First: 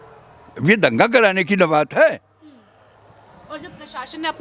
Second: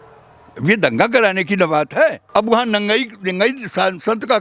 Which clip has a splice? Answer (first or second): second